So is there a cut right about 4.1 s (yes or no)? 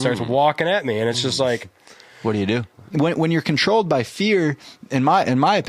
no